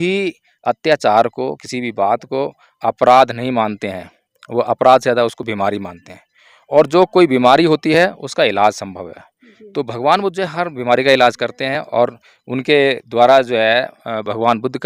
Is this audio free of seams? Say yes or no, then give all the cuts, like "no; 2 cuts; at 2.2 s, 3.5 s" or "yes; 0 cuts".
yes; 0 cuts